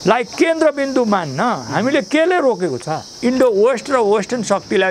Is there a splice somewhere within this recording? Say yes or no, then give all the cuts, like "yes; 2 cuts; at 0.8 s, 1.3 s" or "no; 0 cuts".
yes; 1 cut; at 3.0 s